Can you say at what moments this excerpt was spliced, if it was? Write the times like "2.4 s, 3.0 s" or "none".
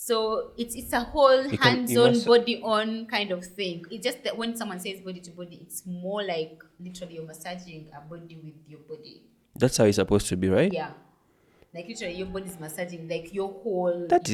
none